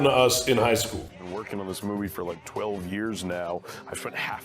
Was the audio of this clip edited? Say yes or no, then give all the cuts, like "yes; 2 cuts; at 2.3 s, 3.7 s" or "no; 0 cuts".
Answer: yes; 1 cut; at 1.0 s